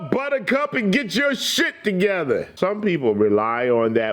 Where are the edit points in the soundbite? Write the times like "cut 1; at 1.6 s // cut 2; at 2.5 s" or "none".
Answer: cut 1; at 2.5 s